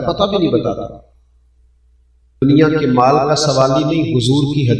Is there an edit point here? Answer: yes; 1 cut; at 2.4 s

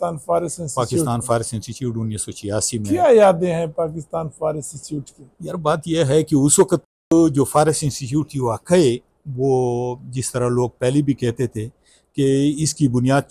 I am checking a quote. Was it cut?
no; 0 cuts

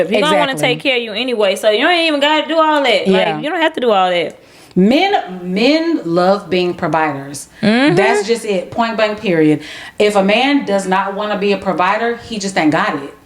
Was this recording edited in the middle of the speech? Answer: no; 0 cuts

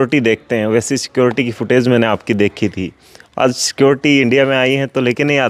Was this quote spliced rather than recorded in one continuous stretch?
no; 0 cuts

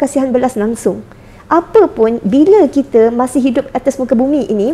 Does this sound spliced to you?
no; 0 cuts

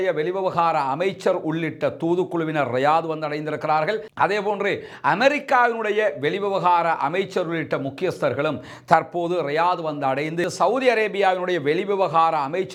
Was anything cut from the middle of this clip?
no; 0 cuts

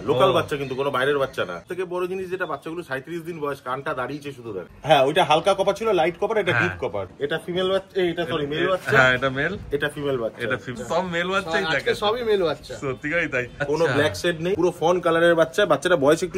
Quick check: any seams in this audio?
yes; 6 cuts; at 1.6 s, 4.6 s, 7.1 s, 10.8 s, 13.7 s, 14.6 s

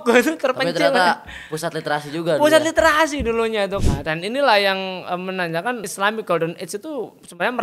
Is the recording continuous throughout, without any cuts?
no; 2 cuts; at 3.8 s, 5.8 s

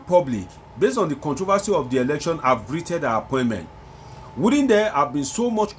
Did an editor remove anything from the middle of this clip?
no; 0 cuts

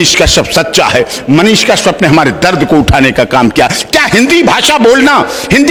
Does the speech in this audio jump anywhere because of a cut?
no; 0 cuts

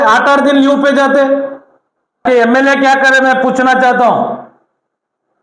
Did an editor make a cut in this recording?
yes; 1 cut; at 2.2 s

